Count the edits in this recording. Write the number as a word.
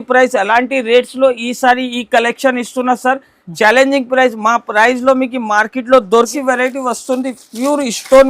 one